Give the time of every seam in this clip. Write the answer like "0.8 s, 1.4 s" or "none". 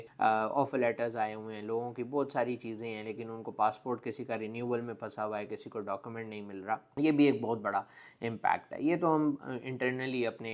none